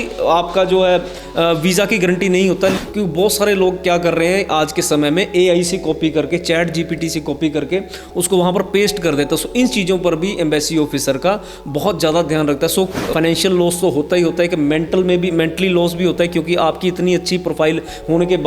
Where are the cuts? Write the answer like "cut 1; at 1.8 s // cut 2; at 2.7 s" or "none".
cut 1; at 2.8 s // cut 2; at 12.8 s